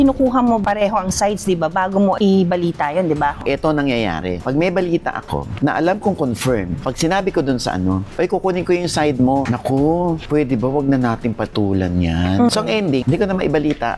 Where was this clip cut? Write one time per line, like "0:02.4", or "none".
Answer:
0:03.4
0:06.8
0:09.5
0:12.5